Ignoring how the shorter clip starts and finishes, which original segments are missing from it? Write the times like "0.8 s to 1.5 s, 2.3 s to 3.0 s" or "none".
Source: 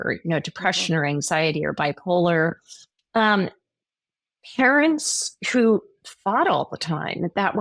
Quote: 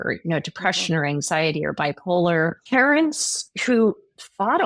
2.6 s to 4.5 s

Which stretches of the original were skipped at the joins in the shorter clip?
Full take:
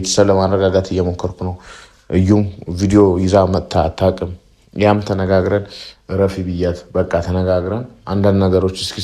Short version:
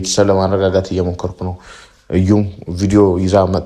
none

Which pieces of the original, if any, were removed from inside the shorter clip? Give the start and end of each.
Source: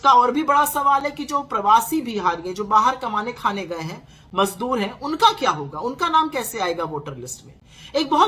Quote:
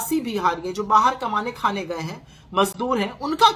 none

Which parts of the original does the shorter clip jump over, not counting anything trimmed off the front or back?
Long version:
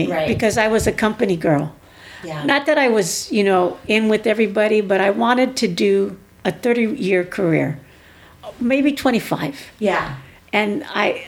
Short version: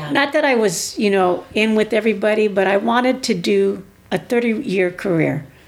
none

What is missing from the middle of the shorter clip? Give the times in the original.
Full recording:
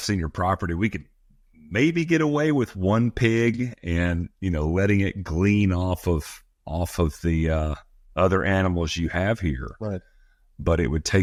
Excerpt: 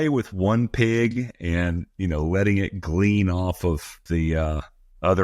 6.4 s to 7.2 s

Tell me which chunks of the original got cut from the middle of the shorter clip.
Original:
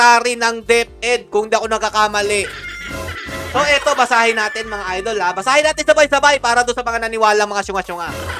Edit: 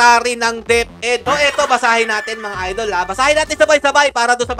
1.2 s to 3.5 s

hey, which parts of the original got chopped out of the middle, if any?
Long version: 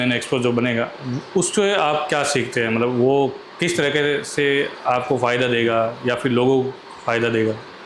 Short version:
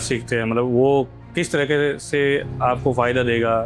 none

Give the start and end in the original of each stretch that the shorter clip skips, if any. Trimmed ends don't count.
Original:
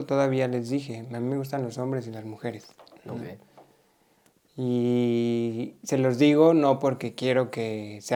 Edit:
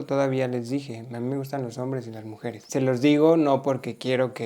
2.6 s to 5.8 s

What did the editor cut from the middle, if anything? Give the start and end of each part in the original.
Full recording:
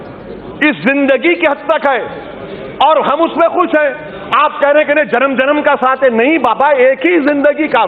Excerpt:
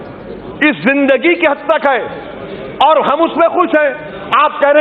none

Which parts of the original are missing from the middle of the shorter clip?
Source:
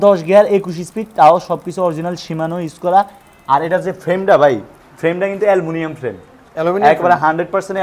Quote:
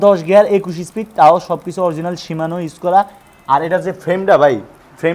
none

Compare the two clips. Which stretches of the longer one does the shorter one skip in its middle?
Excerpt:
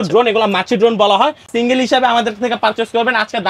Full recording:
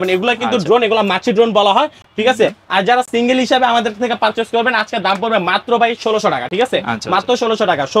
2.1 s to 3.1 s

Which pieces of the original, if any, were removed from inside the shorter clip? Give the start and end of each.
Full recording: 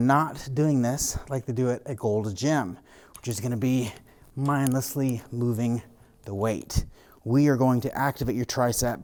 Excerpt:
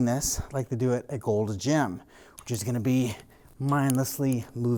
none

